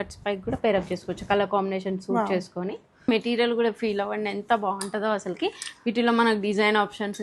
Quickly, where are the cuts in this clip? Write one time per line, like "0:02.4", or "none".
0:03.1